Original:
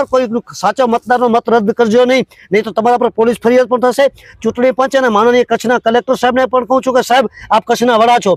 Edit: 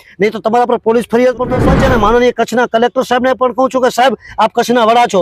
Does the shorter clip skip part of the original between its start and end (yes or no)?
yes